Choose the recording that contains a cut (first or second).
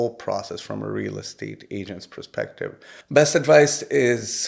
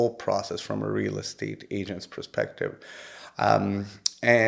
first